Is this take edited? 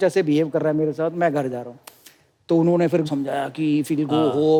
no; 0 cuts

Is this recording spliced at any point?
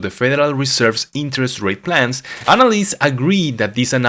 yes; 1 cut; at 2.3 s

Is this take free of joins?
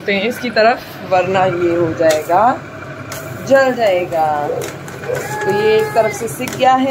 yes; 0 cuts

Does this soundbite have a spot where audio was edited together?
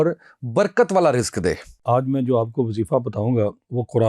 yes; 1 cut; at 1.7 s

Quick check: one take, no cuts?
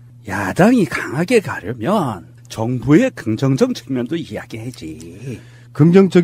no; 1 cut; at 3.6 s

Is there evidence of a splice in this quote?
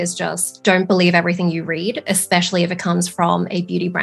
no; 0 cuts

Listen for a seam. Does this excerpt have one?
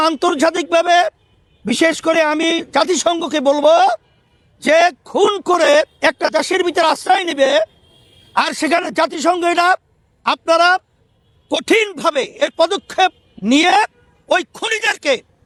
no; 0 cuts

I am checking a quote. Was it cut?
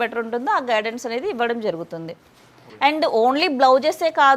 no; 0 cuts

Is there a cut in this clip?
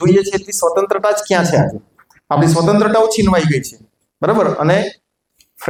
no; 0 cuts

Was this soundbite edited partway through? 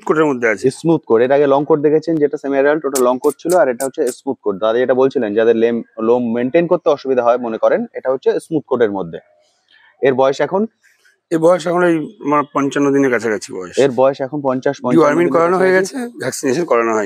no; 0 cuts

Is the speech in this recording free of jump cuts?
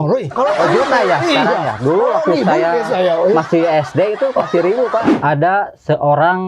no; 1 cut; at 5.1 s

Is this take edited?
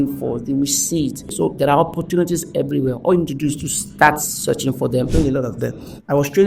yes; 2 cuts; at 1.3 s, 5.1 s

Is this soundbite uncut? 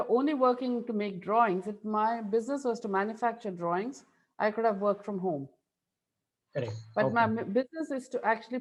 yes; 0 cuts

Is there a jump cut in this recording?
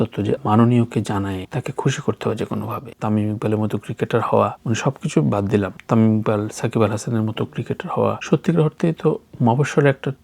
yes; 1 cut; at 2.9 s

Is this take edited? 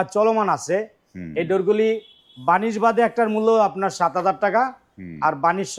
no; 0 cuts

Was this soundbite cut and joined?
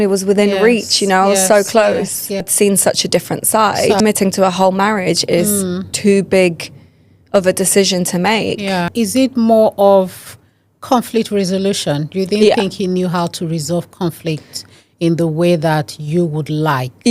yes; 3 cuts; at 2.5 s, 4.0 s, 8.9 s

